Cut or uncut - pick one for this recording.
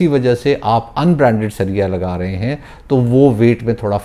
uncut